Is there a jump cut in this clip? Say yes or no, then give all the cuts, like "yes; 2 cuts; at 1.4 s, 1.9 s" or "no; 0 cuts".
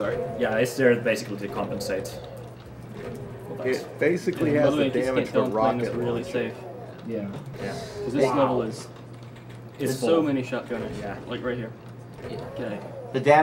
no; 0 cuts